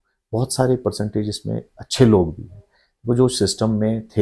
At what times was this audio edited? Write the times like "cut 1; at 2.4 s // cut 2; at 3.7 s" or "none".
none